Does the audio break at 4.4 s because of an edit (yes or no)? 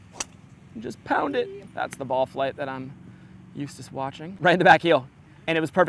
yes